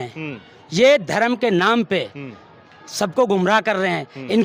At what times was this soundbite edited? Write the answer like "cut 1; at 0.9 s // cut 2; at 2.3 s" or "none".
none